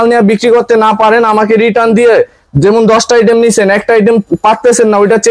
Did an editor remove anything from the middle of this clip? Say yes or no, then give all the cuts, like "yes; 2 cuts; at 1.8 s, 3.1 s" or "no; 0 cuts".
no; 0 cuts